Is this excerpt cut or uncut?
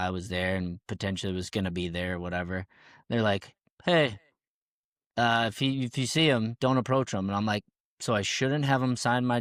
uncut